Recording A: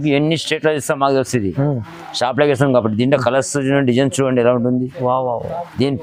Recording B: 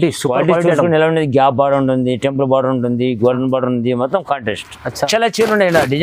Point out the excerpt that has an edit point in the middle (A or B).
B